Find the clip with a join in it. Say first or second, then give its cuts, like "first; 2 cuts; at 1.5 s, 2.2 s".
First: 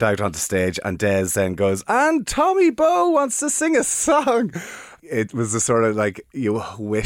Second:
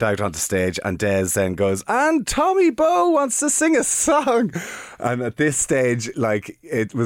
first; 1 cut; at 4.9 s